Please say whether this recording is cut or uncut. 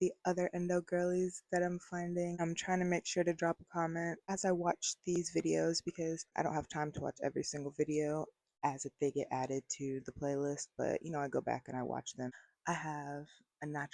cut